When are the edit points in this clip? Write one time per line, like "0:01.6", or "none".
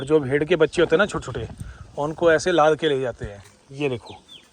0:03.6